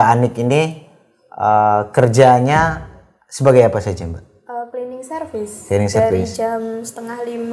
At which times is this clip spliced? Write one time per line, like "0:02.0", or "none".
none